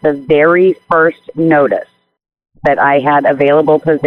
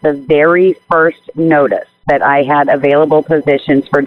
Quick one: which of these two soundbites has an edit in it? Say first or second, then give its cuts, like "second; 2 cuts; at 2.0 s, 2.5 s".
second; 1 cut; at 1.9 s